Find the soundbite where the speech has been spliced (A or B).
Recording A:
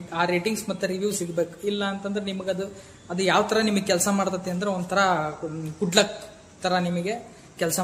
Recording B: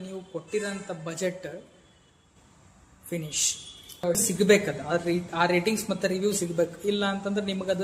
B